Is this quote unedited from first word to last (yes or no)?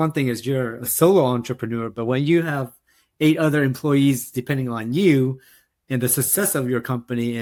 yes